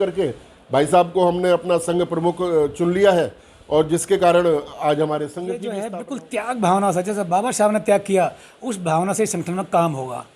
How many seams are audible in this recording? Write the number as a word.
one